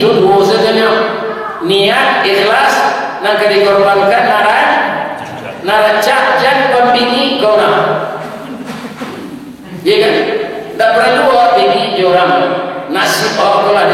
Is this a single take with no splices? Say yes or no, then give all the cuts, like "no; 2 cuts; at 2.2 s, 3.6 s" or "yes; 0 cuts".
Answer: yes; 0 cuts